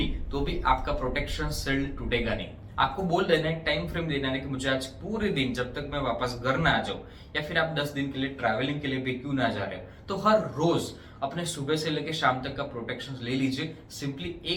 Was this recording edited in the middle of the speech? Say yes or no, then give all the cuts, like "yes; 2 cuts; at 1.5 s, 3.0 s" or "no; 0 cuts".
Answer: no; 0 cuts